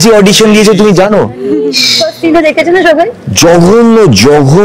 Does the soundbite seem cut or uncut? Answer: uncut